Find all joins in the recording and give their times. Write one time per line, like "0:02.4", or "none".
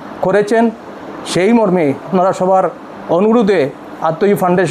0:02.1

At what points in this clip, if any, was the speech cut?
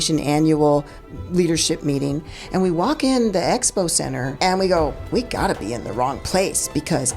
0:04.3
0:05.0

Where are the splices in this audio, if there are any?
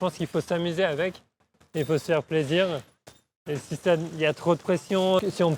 none

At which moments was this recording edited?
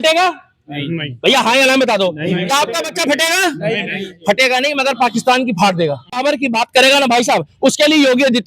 0:06.2

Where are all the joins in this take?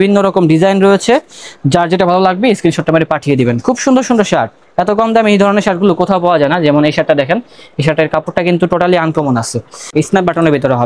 0:09.8

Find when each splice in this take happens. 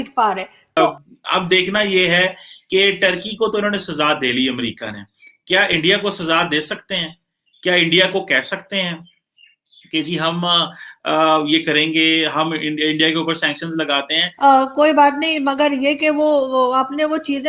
0:00.9
0:14.4

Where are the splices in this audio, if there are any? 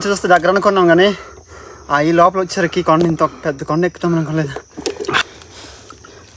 0:05.2

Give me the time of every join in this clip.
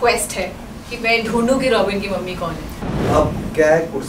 0:02.7

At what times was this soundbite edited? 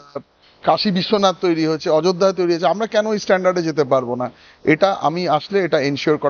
none

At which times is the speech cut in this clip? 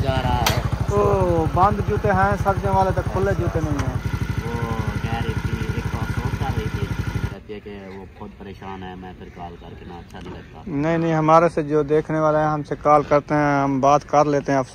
0:04.0
0:07.3

